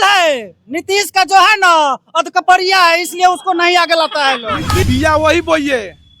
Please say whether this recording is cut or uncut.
cut